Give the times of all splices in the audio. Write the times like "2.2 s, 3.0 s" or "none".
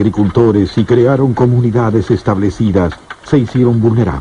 2.0 s